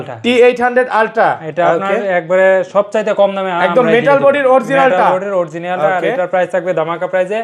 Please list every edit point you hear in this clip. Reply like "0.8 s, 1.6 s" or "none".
none